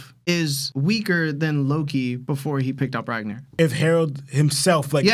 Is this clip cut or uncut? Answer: uncut